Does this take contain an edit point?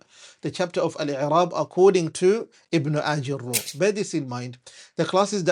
yes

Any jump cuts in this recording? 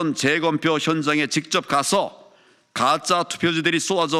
no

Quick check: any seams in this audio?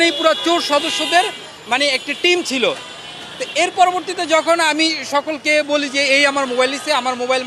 no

